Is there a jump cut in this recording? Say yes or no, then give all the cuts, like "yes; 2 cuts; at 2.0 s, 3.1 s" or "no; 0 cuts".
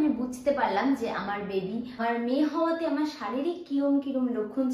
yes; 1 cut; at 2.0 s